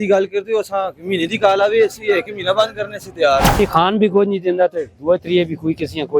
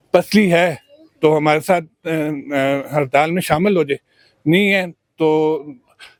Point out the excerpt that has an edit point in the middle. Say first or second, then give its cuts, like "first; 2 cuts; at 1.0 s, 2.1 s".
first; 1 cut; at 3.6 s